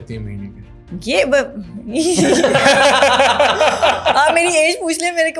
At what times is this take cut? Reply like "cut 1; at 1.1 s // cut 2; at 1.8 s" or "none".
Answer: none